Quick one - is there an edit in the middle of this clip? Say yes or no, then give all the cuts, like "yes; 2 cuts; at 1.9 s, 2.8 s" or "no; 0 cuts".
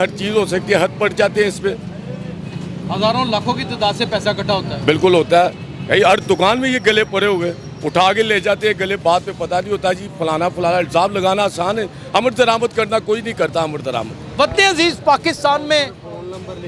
no; 0 cuts